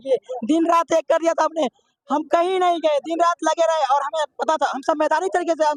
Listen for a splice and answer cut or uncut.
uncut